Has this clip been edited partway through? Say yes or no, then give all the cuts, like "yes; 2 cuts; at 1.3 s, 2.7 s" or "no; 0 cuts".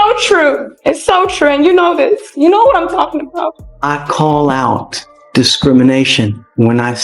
yes; 1 cut; at 3.7 s